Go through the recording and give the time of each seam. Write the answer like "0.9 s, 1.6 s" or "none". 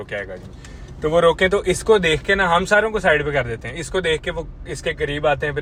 none